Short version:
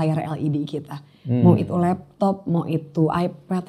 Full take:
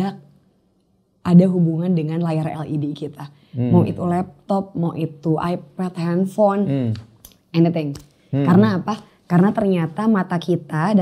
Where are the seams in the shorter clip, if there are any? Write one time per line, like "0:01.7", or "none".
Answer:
none

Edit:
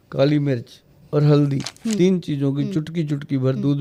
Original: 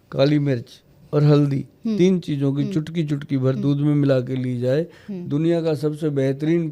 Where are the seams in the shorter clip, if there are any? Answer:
none

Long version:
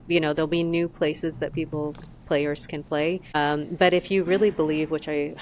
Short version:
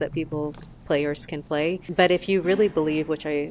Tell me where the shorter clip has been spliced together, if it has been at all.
0:01.9

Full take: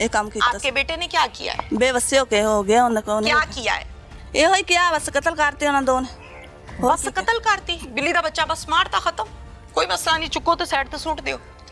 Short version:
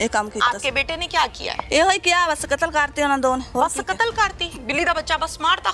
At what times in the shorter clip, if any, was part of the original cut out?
0:01.6
0:03.5

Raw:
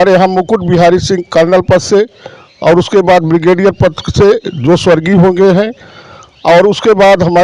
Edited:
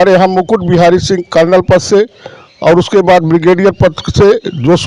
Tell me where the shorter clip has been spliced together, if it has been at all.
none

